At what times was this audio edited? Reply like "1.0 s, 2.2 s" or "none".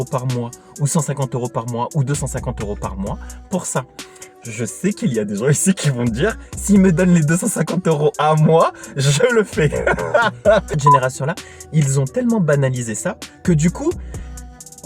10.7 s